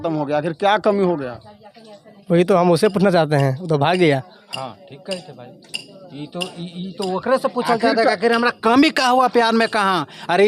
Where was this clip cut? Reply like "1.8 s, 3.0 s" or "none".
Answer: none